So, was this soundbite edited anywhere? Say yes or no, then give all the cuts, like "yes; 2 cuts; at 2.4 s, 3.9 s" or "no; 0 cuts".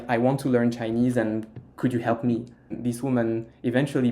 yes; 1 cut; at 2.8 s